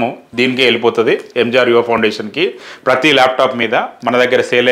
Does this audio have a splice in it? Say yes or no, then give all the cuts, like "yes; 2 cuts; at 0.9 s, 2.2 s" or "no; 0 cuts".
no; 0 cuts